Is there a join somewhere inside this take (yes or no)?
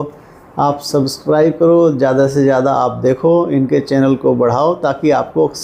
no